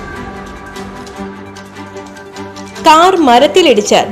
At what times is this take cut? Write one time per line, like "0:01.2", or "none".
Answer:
0:01.5
0:02.5